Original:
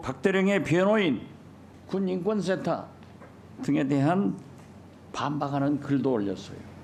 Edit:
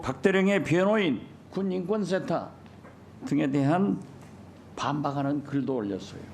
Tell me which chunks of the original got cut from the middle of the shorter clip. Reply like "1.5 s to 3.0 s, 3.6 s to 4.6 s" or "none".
1.4 s to 1.7 s